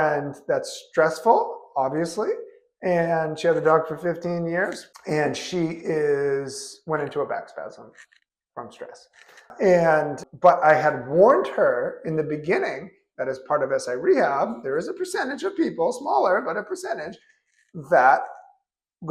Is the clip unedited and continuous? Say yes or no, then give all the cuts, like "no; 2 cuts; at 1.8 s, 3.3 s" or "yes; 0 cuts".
yes; 0 cuts